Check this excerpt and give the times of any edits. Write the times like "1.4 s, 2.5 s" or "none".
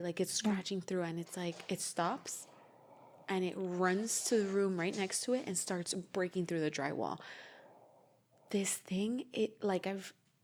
none